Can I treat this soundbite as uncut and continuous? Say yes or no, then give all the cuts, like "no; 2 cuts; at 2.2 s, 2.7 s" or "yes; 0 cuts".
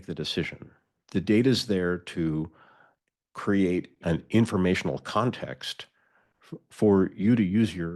no; 1 cut; at 1.0 s